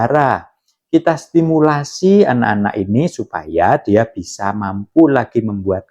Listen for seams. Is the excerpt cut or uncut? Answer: uncut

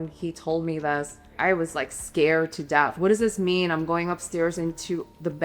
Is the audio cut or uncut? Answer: cut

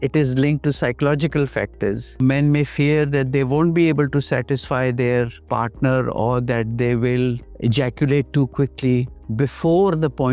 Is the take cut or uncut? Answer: cut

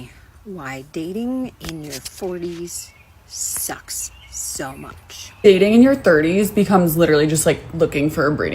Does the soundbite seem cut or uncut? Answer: cut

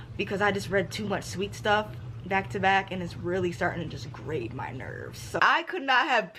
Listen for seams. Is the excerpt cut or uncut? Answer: cut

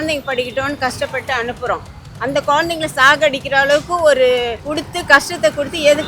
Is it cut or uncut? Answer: cut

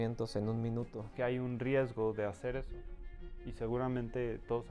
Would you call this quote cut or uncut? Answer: cut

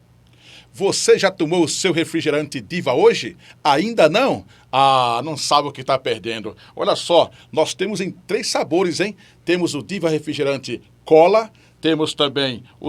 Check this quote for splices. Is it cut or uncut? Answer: uncut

